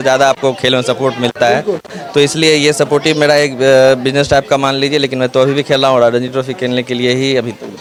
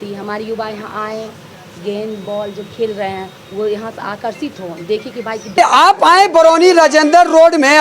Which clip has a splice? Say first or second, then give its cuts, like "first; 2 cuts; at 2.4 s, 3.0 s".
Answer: second; 1 cut; at 5.6 s